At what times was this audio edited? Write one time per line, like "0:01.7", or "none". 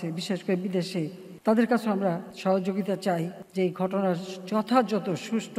0:01.2
0:02.3
0:03.4

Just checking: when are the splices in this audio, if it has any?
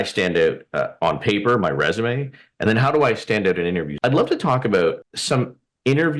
0:03.9

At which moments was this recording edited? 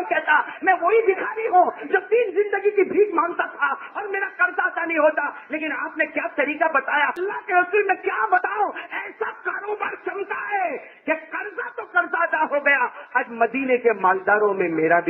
0:07.2

